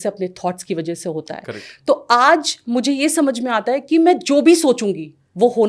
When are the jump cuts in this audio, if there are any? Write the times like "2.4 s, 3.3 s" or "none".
none